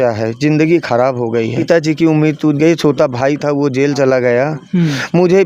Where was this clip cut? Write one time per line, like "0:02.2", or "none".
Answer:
0:01.6